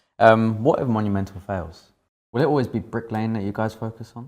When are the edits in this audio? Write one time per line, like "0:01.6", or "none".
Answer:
0:02.1